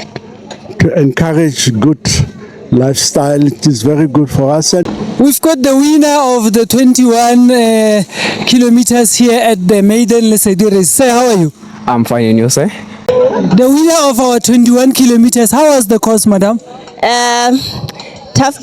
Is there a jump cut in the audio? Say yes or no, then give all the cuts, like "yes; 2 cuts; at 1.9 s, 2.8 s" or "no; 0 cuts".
yes; 2 cuts; at 4.8 s, 13.1 s